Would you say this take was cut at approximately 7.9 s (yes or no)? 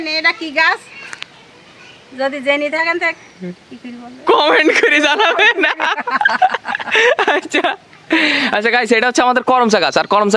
no